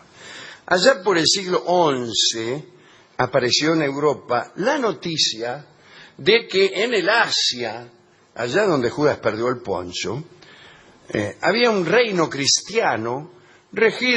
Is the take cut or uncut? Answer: cut